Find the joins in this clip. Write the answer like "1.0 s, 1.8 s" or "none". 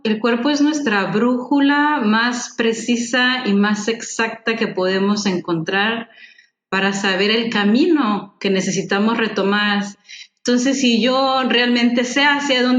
9.9 s